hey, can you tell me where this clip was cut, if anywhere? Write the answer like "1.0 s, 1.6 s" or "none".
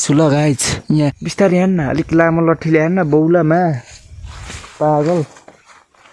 1.2 s